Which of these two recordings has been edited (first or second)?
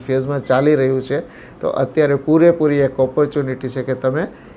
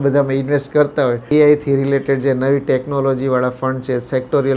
second